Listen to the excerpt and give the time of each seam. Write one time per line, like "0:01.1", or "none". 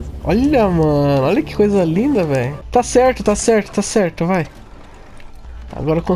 0:02.6